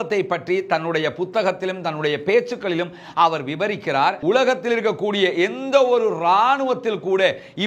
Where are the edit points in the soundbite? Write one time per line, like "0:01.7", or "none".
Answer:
0:04.2